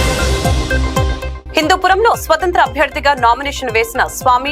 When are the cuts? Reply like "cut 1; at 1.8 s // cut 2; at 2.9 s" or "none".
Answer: cut 1; at 1.1 s